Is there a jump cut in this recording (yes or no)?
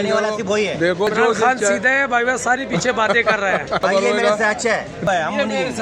yes